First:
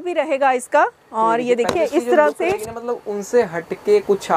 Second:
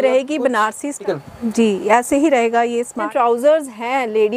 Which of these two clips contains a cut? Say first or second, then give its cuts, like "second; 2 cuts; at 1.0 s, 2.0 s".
second; 2 cuts; at 1.0 s, 3.1 s